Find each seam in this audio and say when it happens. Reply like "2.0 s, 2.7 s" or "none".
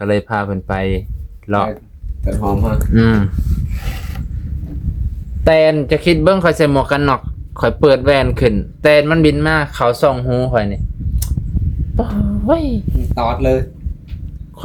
none

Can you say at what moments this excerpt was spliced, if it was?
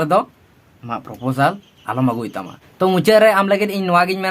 2.6 s

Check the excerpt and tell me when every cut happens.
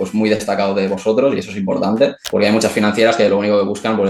2.2 s

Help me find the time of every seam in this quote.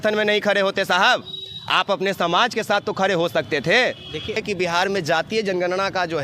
4.4 s

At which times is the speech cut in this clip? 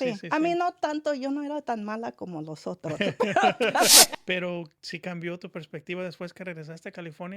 4.1 s

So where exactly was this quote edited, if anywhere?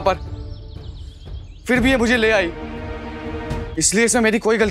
3.7 s

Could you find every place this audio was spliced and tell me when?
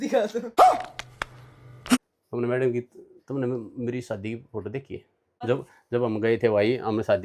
2.0 s, 5.3 s

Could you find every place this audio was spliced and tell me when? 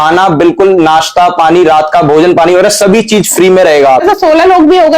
4.0 s

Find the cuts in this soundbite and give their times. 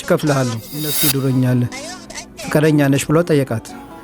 0.9 s

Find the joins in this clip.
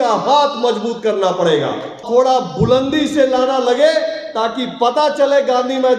2.0 s

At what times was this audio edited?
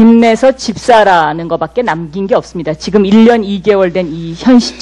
none

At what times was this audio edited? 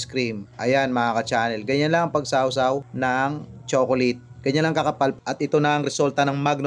5.1 s

